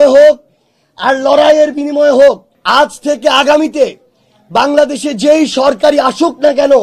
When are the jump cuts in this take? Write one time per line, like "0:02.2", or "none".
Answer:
0:02.5